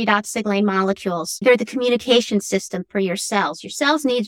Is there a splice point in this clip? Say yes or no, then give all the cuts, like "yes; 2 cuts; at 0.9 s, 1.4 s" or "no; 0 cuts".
yes; 1 cut; at 1.4 s